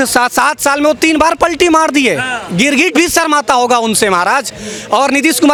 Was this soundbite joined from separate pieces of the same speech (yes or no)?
no